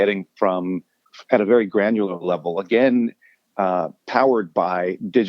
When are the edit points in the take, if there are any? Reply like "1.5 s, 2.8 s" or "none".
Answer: none